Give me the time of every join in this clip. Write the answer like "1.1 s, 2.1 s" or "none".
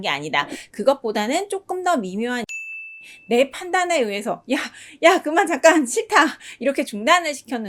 2.5 s